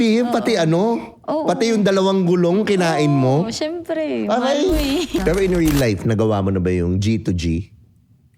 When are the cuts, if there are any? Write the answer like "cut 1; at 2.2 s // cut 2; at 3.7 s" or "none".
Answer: cut 1; at 5.2 s